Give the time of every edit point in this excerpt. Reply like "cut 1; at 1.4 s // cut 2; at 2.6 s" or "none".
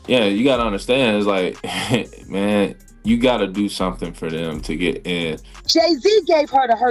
cut 1; at 5.5 s